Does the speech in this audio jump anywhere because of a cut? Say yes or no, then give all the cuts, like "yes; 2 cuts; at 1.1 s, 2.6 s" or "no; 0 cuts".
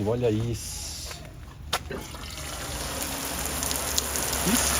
no; 0 cuts